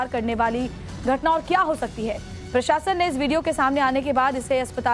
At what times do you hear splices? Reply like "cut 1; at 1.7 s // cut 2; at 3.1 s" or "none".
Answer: cut 1; at 2.8 s